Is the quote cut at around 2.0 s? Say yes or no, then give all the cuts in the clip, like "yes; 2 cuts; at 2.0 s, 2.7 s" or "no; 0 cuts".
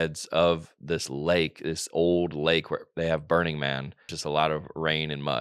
no; 1 cut; at 4.1 s